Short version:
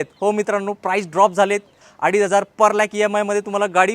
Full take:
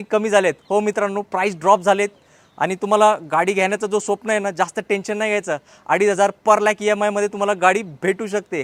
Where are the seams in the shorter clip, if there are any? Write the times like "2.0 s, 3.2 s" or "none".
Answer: 1.8 s